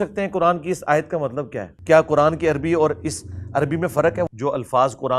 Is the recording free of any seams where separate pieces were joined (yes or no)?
no